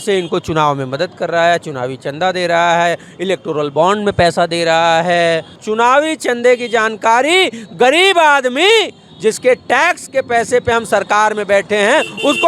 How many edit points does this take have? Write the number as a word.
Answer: one